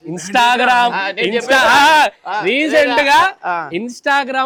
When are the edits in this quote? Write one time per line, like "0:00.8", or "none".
none